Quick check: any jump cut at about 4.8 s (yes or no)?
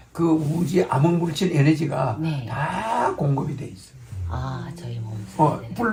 no